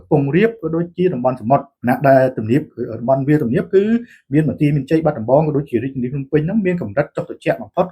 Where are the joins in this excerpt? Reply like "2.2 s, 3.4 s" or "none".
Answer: 1.7 s